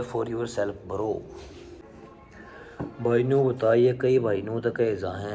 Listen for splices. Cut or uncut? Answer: cut